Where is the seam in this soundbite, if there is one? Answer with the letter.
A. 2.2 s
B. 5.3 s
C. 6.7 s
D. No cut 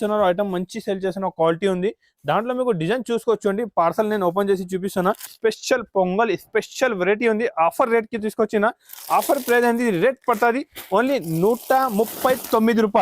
B